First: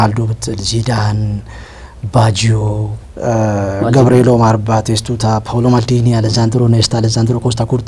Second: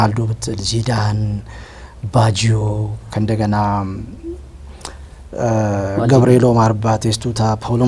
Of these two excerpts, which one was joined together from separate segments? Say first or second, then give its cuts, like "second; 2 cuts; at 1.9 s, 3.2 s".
first; 1 cut; at 3.0 s